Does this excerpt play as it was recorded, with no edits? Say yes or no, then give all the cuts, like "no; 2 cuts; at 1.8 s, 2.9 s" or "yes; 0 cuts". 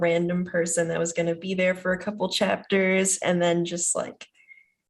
yes; 0 cuts